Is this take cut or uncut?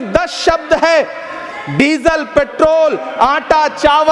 uncut